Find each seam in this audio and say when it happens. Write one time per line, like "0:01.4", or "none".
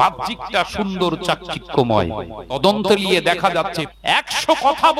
0:02.6
0:03.8

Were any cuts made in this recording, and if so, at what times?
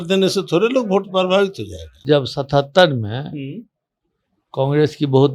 0:02.0

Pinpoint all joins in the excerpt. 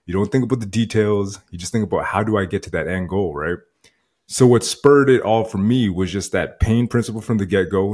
none

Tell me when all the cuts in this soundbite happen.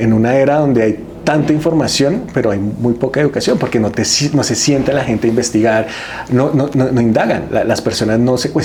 none

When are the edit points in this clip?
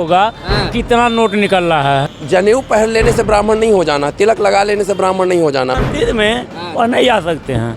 0:02.1
0:05.8

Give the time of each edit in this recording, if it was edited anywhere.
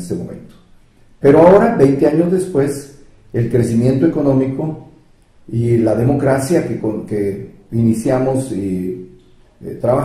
0:02.4

